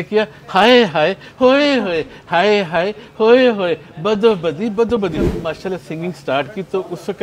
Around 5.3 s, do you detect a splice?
yes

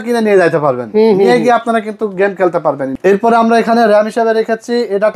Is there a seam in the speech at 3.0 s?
yes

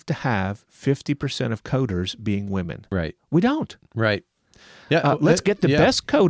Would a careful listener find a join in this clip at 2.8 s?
yes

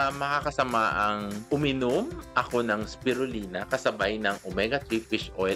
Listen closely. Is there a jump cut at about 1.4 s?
yes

